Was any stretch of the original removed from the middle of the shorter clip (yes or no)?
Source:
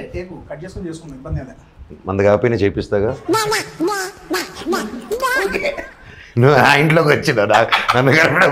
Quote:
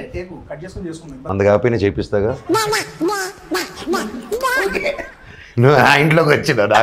yes